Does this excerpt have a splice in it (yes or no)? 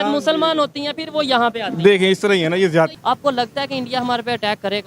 yes